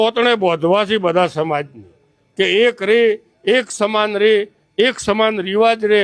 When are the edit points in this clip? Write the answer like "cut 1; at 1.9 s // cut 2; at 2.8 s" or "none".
none